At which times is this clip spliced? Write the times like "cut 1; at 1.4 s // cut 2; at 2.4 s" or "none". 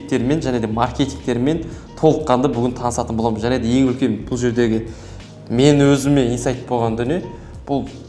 none